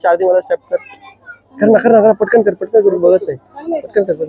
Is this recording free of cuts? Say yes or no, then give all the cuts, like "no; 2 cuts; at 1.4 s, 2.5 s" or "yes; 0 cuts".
yes; 0 cuts